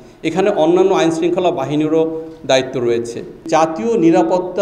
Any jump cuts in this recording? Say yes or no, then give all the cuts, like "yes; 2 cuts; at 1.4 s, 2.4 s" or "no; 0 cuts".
yes; 1 cut; at 3.3 s